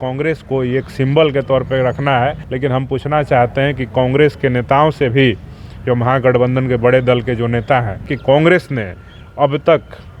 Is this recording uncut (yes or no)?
no